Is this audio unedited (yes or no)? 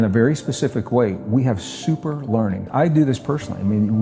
no